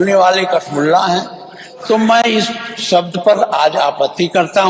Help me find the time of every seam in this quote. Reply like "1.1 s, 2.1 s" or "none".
none